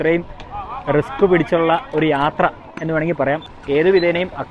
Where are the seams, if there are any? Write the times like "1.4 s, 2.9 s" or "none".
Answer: 3.5 s